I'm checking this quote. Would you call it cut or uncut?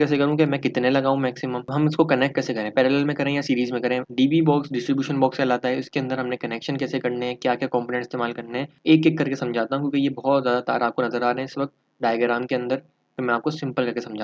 cut